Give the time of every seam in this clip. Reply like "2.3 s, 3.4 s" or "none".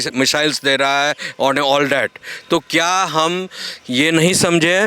none